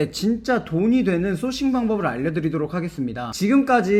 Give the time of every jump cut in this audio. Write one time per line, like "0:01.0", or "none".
none